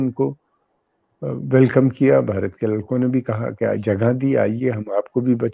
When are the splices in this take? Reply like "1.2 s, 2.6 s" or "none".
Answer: none